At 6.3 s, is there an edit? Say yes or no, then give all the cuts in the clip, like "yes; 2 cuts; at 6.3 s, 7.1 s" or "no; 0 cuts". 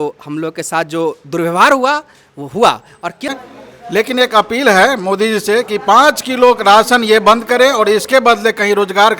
no; 1 cut; at 3.3 s